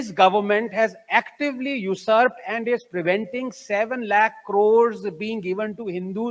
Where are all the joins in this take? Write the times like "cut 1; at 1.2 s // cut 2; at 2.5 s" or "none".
none